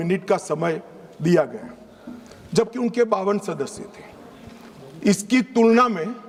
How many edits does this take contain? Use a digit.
0